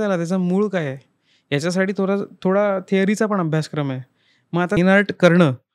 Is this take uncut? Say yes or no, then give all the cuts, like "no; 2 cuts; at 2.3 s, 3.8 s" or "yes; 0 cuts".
no; 1 cut; at 4.8 s